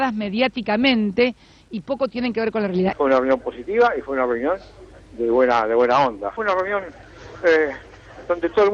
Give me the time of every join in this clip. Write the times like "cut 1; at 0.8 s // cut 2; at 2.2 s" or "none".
cut 1; at 2.9 s // cut 2; at 6.4 s